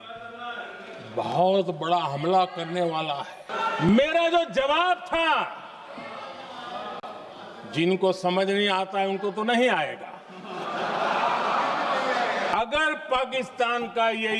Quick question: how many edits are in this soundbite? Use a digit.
2